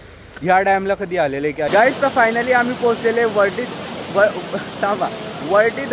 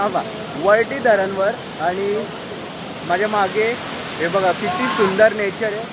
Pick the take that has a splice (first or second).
first